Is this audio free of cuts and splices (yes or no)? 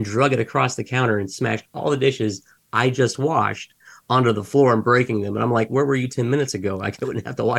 yes